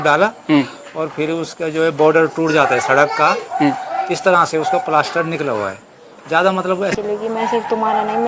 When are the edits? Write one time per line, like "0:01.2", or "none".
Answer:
0:06.9